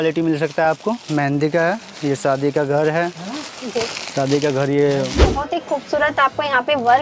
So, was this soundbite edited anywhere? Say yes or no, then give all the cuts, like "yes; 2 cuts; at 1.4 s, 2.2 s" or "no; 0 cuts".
yes; 1 cut; at 5.2 s